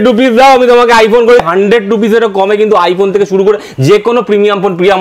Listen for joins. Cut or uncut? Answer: cut